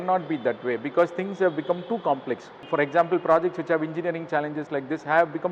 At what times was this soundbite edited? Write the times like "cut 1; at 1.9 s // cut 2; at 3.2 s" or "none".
cut 1; at 2.6 s